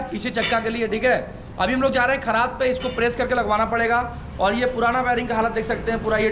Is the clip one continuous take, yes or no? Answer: yes